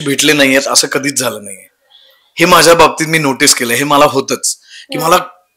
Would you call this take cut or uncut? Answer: uncut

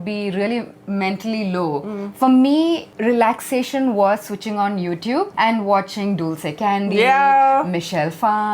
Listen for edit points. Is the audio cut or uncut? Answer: cut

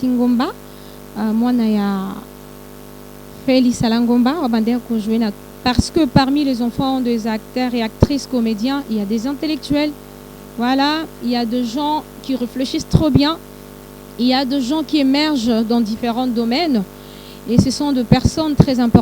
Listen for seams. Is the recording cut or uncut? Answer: cut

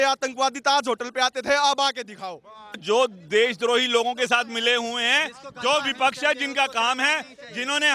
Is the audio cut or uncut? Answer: cut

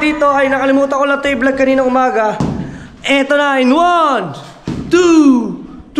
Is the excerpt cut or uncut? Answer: uncut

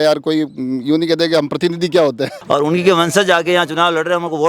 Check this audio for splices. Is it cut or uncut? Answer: cut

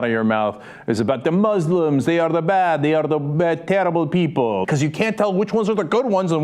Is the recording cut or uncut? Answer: cut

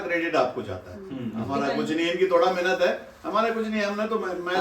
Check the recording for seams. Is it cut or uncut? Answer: uncut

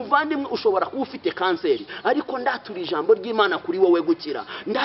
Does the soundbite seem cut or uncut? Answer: uncut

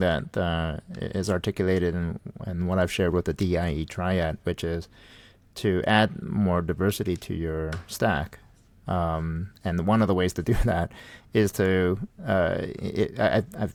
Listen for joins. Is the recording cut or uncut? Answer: uncut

